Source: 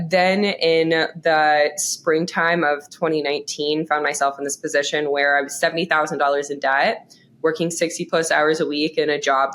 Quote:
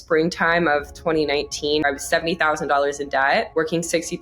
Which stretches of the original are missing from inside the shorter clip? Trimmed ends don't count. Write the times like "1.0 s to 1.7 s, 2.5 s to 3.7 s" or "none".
3.8 s to 5.3 s, 7.0 s to 7.4 s